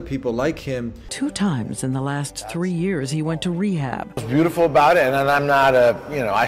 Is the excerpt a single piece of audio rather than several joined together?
no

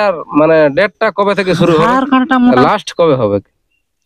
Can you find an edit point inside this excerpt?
yes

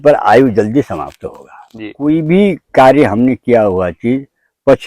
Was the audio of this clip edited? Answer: yes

